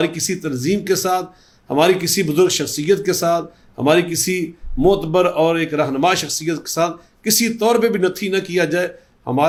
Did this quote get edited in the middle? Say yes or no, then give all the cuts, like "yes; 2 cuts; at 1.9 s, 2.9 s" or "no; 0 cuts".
no; 0 cuts